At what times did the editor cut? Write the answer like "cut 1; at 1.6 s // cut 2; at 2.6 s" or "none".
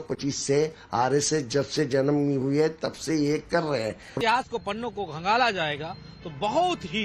none